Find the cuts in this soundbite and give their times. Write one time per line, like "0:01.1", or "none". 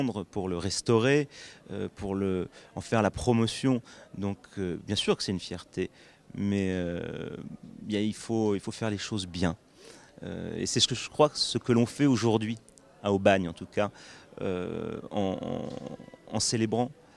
0:12.1